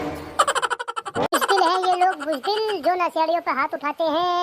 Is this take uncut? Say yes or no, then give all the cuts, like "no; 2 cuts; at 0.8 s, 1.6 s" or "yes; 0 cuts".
no; 1 cut; at 1.3 s